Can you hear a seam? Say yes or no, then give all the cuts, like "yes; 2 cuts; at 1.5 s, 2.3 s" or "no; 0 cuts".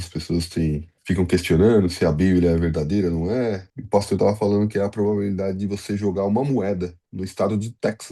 yes; 2 cuts; at 0.9 s, 3.7 s